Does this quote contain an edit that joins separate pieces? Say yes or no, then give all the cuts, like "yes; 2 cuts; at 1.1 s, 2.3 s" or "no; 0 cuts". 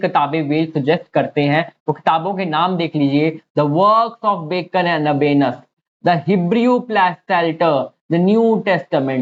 no; 0 cuts